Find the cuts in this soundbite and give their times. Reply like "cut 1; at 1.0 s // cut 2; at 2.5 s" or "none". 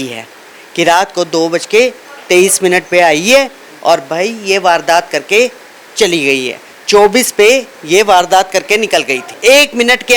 cut 1; at 9.2 s